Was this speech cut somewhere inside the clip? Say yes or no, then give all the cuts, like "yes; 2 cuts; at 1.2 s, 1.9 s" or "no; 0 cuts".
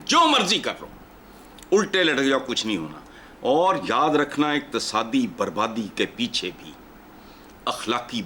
no; 0 cuts